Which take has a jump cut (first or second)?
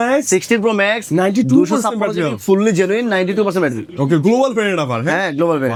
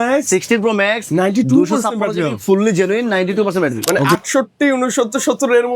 second